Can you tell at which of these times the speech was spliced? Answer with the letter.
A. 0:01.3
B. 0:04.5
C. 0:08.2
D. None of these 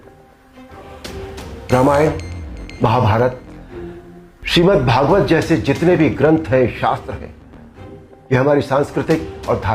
A